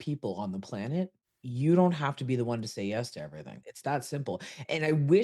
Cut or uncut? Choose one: cut